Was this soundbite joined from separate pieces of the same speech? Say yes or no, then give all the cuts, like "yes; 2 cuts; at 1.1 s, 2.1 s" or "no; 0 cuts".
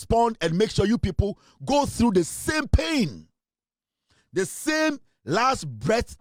no; 0 cuts